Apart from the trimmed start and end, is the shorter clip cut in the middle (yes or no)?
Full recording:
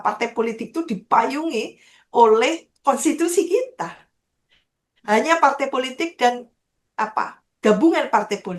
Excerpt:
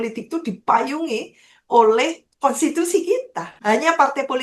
yes